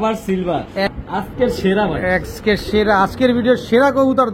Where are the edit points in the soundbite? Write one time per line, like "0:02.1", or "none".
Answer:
0:00.9

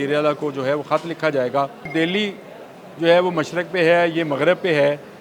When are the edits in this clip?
0:01.9

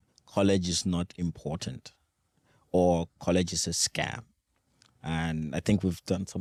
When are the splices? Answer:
none

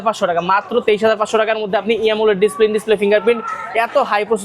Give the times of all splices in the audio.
none

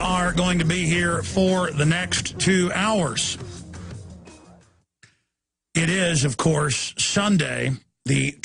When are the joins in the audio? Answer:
none

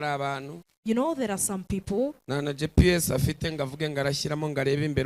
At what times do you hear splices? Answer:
none

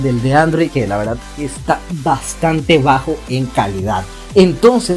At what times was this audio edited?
none

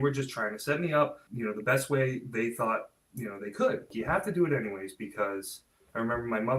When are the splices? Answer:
0:01.2
0:03.0
0:03.9

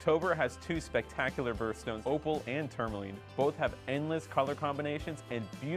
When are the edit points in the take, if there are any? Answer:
0:02.0

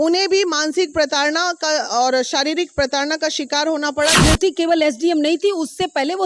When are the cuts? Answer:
0:04.2

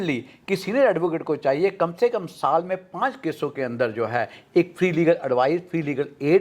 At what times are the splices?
none

